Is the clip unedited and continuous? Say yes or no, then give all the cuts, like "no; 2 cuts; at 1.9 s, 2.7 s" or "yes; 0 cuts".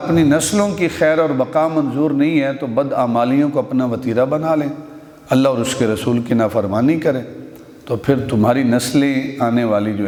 yes; 0 cuts